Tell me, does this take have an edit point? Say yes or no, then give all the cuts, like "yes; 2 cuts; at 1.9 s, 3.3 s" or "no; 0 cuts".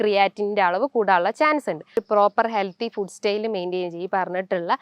yes; 1 cut; at 2.0 s